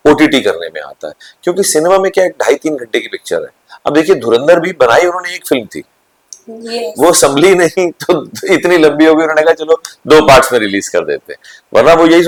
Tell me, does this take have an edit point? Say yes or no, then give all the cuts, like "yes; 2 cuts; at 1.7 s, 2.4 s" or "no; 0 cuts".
no; 0 cuts